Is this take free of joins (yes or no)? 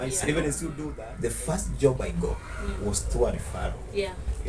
no